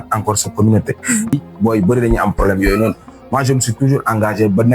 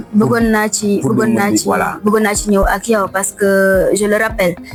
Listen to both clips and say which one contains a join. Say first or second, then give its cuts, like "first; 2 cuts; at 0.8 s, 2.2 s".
first; 1 cut; at 1.3 s